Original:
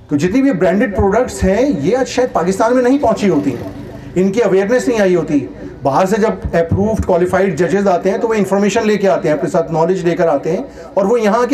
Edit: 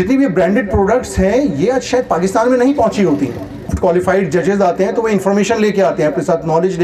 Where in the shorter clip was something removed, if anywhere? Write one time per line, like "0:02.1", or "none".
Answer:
0:03.7